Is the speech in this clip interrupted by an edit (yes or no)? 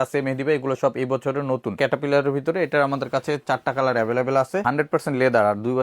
yes